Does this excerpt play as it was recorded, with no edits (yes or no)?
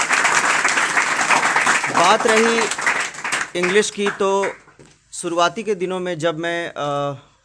yes